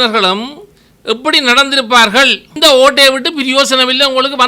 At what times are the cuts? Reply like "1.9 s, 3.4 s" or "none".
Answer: 2.6 s